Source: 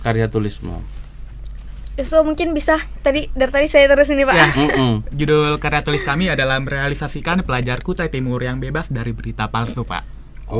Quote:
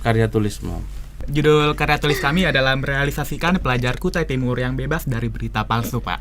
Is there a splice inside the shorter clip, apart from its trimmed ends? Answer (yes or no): yes